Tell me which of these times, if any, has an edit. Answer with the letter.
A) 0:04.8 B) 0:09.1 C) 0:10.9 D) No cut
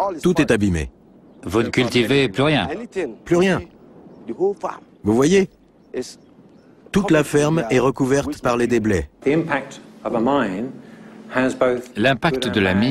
B